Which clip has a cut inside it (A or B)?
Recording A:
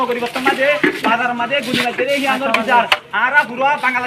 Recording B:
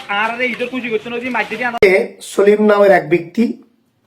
B